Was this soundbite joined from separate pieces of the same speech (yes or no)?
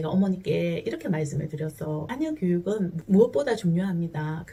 no